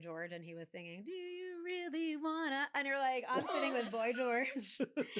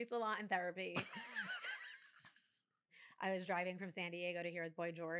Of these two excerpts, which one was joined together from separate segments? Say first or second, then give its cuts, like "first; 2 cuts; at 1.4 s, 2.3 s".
second; 1 cut; at 2.9 s